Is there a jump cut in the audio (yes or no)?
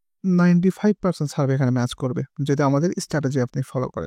no